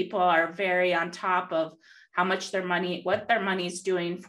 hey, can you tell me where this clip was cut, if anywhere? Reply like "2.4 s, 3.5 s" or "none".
none